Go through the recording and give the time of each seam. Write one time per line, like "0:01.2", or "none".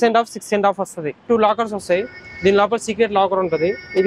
0:01.2